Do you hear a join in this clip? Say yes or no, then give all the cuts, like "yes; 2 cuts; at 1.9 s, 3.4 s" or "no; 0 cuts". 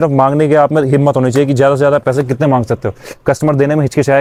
no; 0 cuts